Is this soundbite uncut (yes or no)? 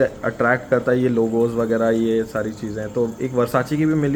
yes